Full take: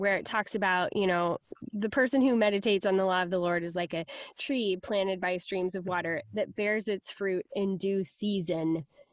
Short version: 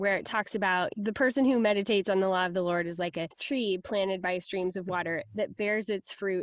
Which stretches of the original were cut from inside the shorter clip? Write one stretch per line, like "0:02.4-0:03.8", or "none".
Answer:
0:00.9-0:01.7
0:04.1-0:04.3